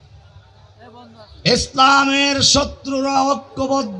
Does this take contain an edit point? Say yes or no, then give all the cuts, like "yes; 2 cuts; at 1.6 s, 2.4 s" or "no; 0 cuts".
no; 0 cuts